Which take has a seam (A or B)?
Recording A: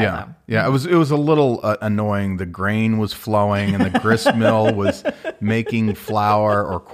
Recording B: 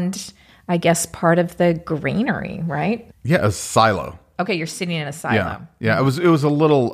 B